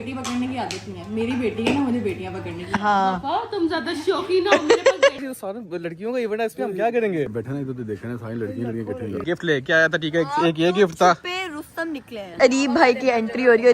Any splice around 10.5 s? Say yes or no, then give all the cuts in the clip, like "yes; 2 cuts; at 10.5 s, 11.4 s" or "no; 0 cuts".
no; 4 cuts; at 5.2 s, 7.3 s, 9.2 s, 12.3 s